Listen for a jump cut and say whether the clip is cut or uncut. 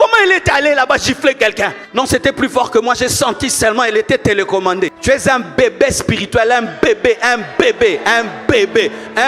cut